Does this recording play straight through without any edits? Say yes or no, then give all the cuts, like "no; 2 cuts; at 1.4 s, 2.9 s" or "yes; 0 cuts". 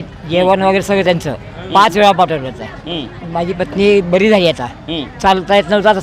yes; 0 cuts